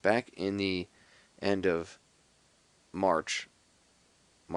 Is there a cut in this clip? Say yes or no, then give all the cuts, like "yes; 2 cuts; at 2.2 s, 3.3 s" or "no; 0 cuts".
yes; 1 cut; at 1.0 s